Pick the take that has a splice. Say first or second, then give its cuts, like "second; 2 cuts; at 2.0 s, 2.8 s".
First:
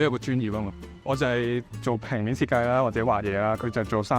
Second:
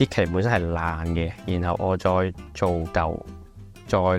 first; 1 cut; at 1.7 s